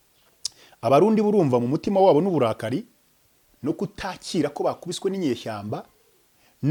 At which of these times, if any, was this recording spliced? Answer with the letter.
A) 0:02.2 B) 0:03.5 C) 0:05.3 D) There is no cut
D